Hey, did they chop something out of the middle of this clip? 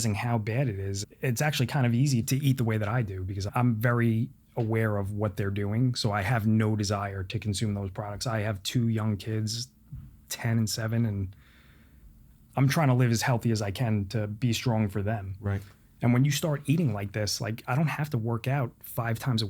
yes; 4 cuts; at 1.0 s, 2.2 s, 3.5 s, 12.3 s

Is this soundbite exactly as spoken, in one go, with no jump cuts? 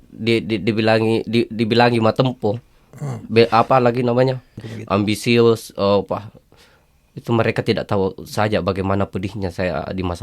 no; 1 cut; at 4.6 s

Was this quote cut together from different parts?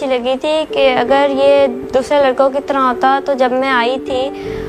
no; 0 cuts

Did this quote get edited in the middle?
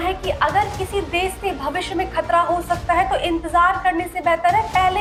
no; 0 cuts

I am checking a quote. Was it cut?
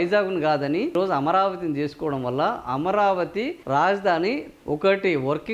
yes; 2 cuts; at 0.9 s, 4.5 s

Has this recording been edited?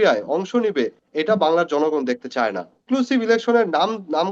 yes; 1 cut; at 2.8 s

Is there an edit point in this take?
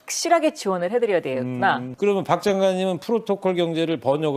yes; 1 cut; at 1.9 s

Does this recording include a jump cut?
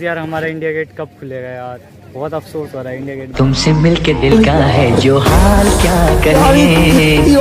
no; 0 cuts

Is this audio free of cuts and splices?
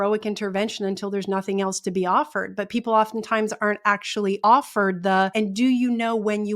no; 2 cuts; at 4.4 s, 5.3 s

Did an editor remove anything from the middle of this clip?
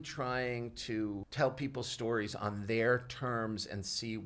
yes; 1 cut; at 1.3 s

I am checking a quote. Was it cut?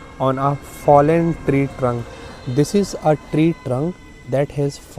no; 0 cuts

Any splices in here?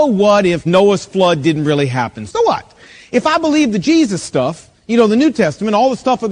yes; 1 cut; at 2.2 s

